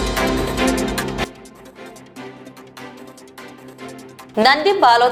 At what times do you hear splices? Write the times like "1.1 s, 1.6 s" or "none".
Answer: none